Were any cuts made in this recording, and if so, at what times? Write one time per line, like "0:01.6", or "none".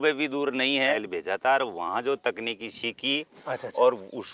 0:01.1

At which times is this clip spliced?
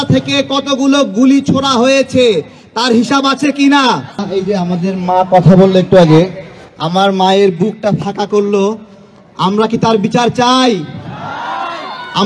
0:04.2

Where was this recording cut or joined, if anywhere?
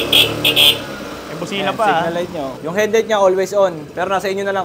0:02.6

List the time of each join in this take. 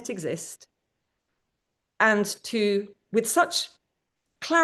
none

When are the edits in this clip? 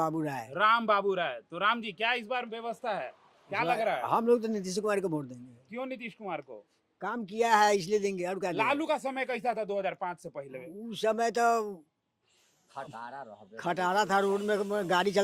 none

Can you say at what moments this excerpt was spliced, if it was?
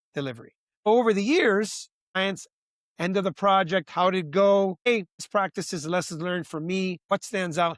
0:00.9
0:02.2
0:04.9
0:07.0

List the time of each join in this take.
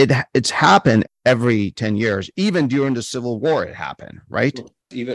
0:01.1

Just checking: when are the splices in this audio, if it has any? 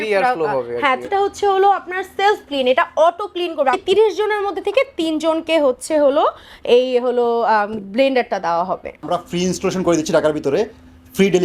0:01.1
0:03.8
0:09.1

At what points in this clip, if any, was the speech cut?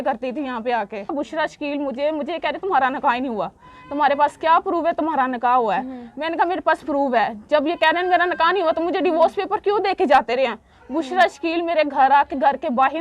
0:01.1

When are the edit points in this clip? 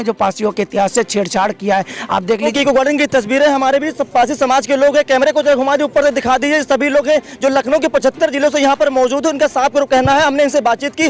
0:02.5

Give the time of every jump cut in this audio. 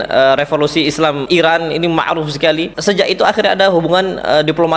0:01.2
0:02.7

